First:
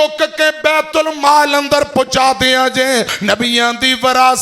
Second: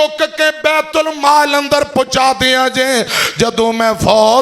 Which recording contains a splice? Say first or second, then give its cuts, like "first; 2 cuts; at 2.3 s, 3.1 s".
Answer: first; 1 cut; at 3.1 s